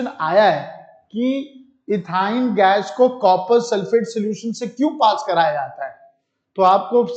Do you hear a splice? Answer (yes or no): no